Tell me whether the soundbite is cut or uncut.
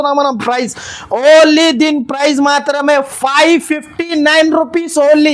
uncut